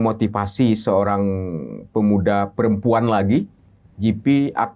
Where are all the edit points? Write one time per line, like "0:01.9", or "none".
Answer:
none